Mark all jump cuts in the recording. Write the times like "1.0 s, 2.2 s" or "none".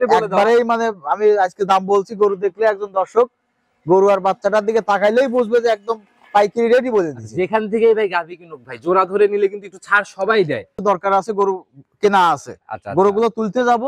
10.7 s